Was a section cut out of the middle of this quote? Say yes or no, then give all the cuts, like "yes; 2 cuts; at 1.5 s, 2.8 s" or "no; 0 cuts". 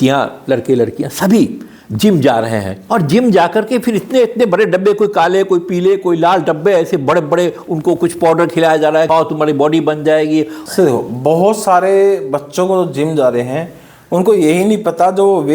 yes; 3 cuts; at 2.7 s, 9.1 s, 10.6 s